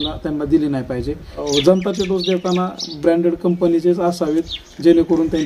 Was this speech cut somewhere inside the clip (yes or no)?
yes